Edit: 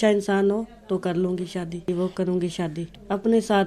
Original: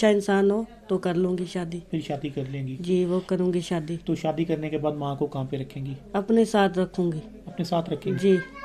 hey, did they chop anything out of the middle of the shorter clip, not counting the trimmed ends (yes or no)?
yes